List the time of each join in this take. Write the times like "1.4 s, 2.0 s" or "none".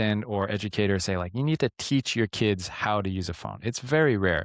none